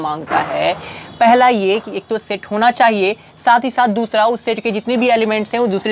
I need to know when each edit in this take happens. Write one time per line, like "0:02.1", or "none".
none